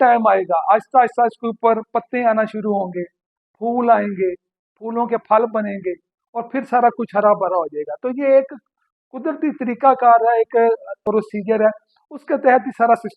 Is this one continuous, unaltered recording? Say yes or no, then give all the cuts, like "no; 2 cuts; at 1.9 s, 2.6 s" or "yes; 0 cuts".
no; 1 cut; at 11.0 s